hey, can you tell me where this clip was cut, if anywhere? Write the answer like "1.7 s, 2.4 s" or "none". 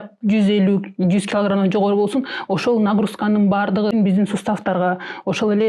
3.9 s